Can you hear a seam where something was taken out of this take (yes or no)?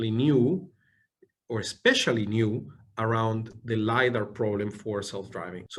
no